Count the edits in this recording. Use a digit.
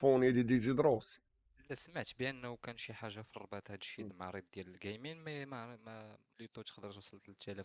1